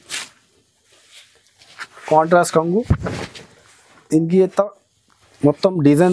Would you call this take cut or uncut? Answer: uncut